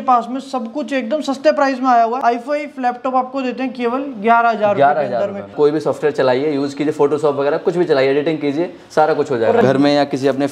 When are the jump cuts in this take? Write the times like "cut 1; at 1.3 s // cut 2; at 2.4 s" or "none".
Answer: cut 1; at 2.2 s // cut 2; at 5.5 s // cut 3; at 9.6 s